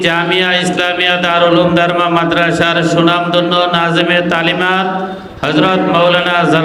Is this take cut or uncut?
uncut